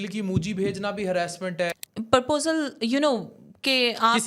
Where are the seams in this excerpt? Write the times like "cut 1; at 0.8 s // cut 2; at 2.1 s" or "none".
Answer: cut 1; at 1.7 s